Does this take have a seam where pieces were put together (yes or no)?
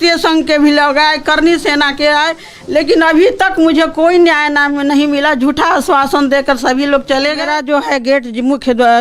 yes